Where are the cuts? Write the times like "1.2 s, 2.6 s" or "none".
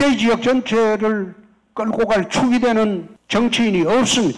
3.1 s